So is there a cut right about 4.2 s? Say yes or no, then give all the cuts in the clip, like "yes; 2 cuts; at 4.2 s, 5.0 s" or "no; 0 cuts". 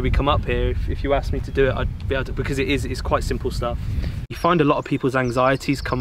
yes; 1 cut; at 4.2 s